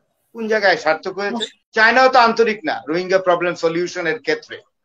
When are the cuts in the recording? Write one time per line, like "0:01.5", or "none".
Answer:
0:01.7